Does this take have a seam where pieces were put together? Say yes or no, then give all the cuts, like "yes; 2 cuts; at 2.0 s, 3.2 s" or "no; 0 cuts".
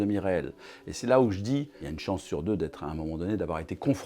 yes; 1 cut; at 1.8 s